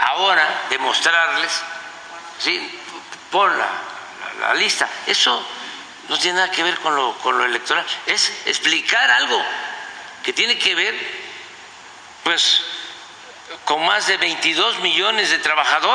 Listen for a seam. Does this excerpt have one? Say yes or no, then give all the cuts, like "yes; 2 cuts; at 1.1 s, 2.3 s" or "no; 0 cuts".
no; 0 cuts